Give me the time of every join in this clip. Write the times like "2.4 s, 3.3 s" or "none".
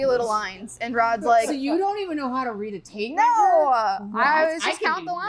none